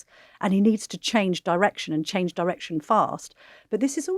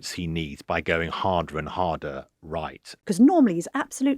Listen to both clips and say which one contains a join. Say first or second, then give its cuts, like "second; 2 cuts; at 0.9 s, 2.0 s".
second; 1 cut; at 2.9 s